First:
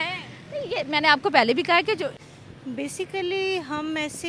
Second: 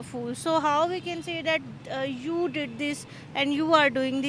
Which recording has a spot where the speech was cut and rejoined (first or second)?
first